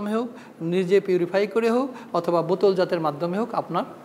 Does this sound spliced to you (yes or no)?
no